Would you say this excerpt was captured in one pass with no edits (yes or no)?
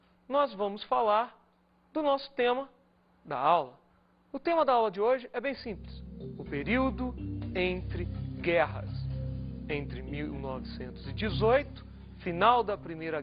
no